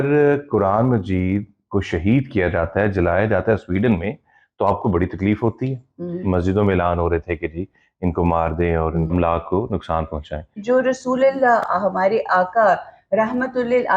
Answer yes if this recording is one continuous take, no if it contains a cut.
no